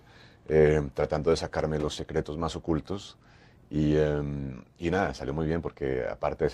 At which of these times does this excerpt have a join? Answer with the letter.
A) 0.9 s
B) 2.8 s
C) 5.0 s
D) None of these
D